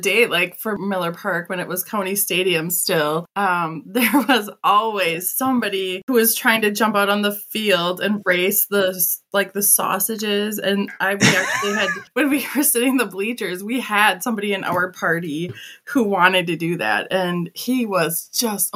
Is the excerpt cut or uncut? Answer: cut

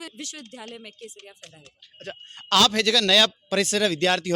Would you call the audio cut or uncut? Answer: uncut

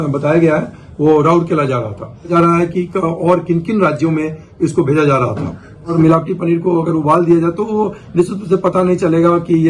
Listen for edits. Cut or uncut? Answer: cut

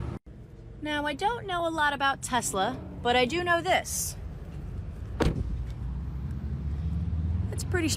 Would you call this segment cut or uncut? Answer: uncut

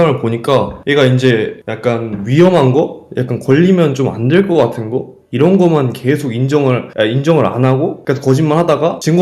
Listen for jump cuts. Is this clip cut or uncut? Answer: uncut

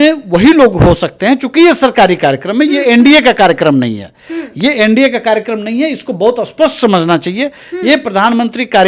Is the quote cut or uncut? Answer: uncut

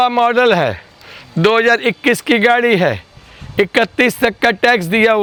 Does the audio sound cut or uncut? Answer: uncut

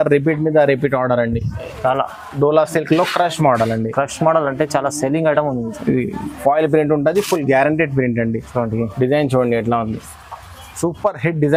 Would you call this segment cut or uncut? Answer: uncut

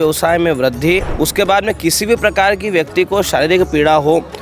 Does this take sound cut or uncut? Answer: cut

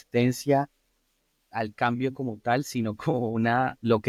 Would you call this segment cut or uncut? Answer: uncut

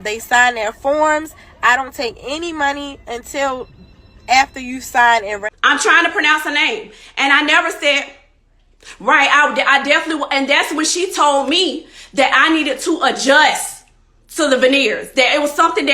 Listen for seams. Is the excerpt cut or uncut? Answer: cut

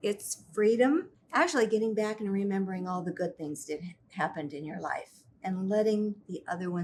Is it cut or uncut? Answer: uncut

